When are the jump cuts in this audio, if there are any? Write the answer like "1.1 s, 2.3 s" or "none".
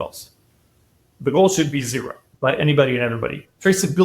2.2 s